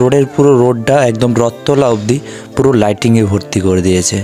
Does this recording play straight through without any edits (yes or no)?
yes